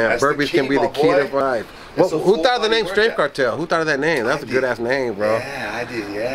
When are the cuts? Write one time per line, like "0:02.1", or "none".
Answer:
0:01.4